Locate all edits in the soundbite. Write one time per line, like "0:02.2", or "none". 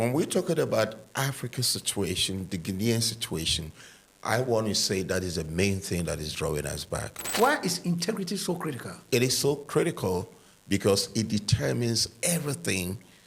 0:07.3
0:09.0